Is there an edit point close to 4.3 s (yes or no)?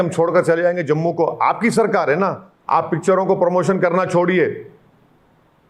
no